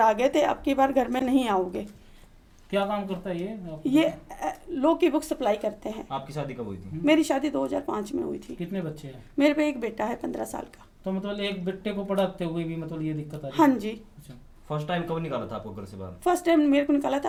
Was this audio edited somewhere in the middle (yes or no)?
no